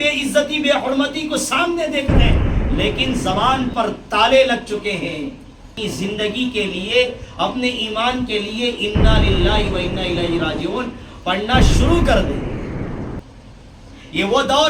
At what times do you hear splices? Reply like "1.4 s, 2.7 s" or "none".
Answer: 5.7 s